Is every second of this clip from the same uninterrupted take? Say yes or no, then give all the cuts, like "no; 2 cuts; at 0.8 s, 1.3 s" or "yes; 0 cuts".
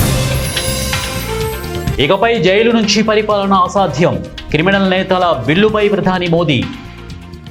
yes; 0 cuts